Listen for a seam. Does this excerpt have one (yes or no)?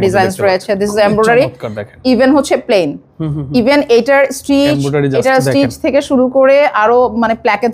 no